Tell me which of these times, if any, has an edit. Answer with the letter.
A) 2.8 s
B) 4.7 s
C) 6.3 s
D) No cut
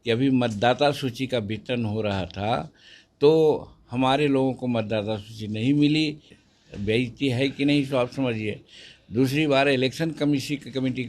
C